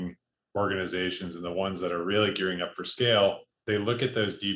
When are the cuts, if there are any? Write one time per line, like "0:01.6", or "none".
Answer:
0:03.5